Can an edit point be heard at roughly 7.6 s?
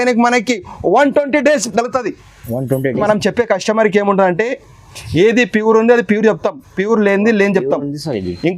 no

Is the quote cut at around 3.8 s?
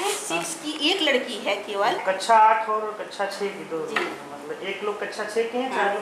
no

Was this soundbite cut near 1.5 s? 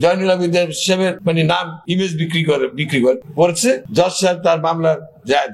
yes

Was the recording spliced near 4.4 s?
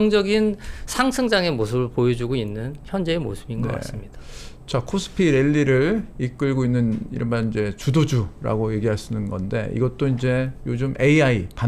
no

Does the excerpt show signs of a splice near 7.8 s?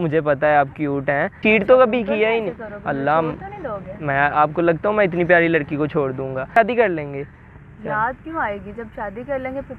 no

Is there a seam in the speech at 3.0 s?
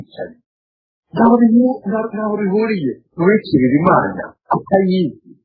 no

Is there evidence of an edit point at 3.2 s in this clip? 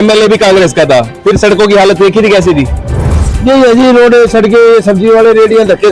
yes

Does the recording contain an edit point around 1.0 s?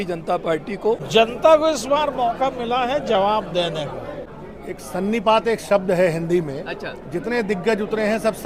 yes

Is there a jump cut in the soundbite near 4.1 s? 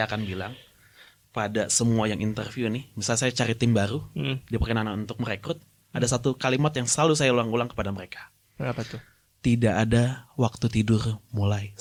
no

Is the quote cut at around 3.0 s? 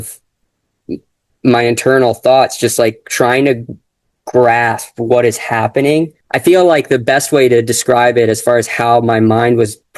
no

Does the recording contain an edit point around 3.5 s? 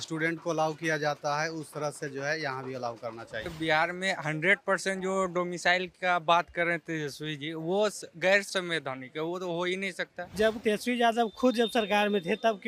yes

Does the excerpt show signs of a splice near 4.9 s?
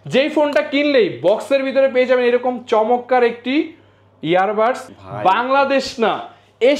yes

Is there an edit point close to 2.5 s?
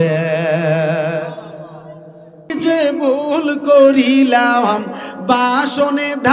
yes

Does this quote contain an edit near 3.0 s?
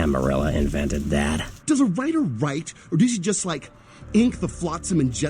no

